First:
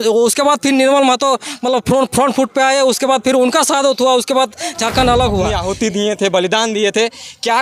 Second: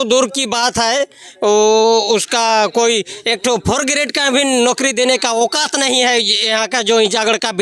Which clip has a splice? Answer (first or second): first